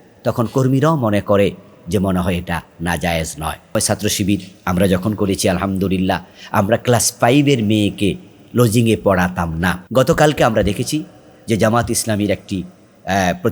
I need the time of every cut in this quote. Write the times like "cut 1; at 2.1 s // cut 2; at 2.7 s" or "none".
cut 1; at 3.8 s // cut 2; at 9.8 s